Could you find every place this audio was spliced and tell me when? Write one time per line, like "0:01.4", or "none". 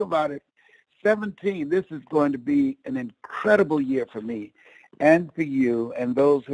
none

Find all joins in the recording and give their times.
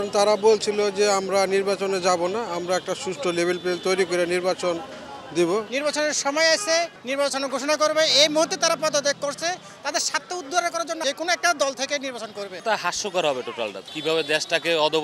0:05.7
0:07.0
0:11.0
0:12.5
0:13.8

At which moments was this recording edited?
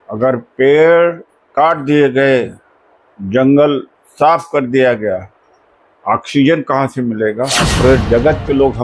0:07.7

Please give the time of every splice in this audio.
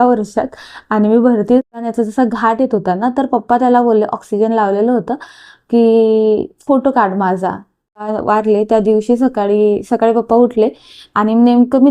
0:01.8
0:08.0

